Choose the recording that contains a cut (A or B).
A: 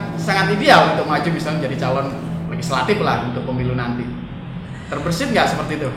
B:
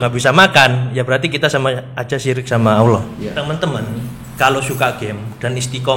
B